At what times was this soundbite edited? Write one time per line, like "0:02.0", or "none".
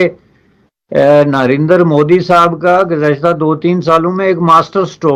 none